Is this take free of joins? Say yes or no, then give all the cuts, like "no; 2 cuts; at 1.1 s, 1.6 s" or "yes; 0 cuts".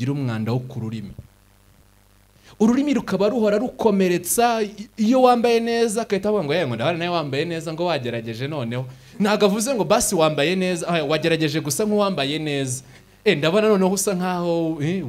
yes; 0 cuts